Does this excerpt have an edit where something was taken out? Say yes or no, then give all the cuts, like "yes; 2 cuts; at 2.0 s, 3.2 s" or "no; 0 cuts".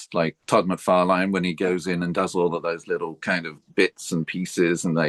no; 0 cuts